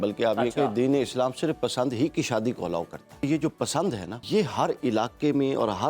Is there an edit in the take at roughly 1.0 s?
no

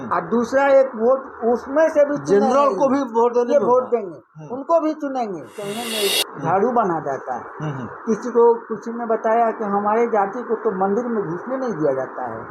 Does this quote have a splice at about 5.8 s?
yes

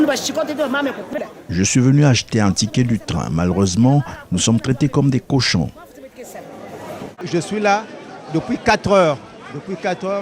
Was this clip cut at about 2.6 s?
no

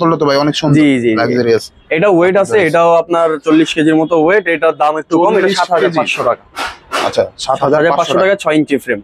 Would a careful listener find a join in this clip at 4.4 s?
no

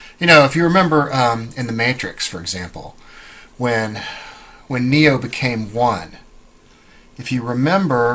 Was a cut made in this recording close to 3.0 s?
no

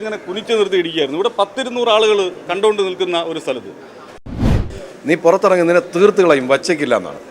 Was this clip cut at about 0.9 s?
no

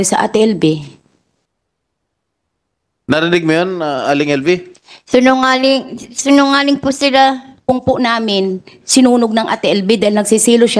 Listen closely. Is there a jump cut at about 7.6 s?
yes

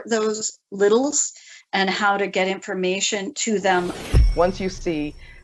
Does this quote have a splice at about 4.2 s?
yes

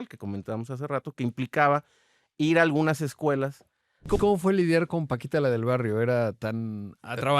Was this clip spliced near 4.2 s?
yes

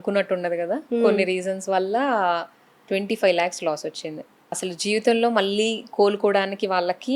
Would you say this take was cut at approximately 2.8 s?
yes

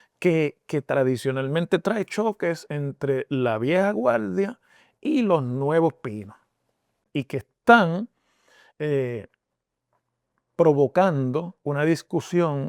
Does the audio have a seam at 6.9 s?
yes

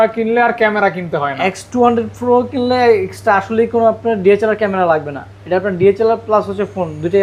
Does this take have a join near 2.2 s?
no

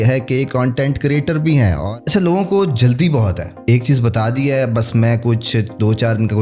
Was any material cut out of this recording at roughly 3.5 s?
yes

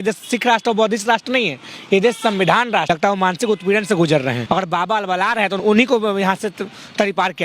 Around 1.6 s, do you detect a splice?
no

